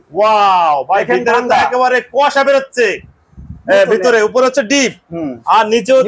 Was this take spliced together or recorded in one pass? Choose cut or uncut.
uncut